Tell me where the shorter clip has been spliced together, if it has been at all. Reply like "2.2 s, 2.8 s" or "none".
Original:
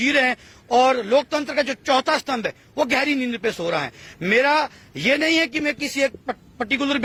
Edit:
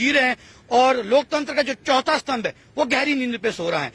none